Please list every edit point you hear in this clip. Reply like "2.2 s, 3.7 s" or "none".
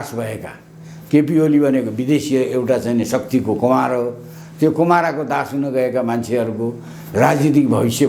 none